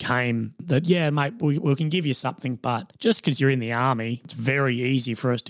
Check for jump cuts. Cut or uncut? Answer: cut